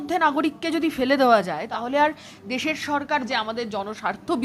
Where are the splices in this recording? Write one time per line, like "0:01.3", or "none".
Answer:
0:01.7
0:03.2